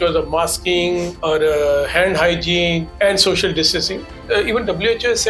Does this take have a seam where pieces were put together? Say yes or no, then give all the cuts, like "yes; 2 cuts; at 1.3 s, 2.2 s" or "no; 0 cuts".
yes; 3 cuts; at 1.1 s, 2.9 s, 4.2 s